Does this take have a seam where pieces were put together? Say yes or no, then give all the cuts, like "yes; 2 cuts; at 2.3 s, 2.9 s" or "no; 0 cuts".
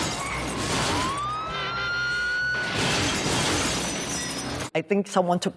no; 0 cuts